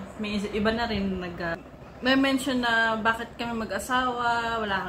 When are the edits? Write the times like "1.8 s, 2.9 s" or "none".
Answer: 1.6 s